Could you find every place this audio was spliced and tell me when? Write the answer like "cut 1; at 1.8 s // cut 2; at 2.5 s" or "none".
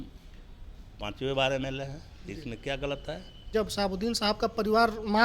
cut 1; at 3.5 s